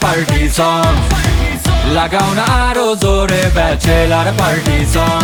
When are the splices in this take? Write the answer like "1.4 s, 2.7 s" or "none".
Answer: none